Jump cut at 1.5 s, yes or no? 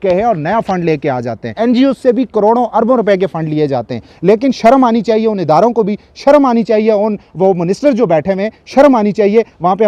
yes